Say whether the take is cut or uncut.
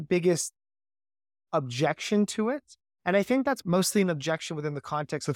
cut